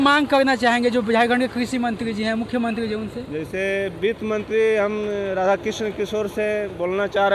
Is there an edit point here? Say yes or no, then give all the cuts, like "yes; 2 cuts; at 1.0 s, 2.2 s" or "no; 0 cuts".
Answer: no; 0 cuts